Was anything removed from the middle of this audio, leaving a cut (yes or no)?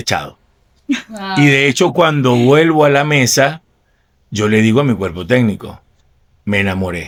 no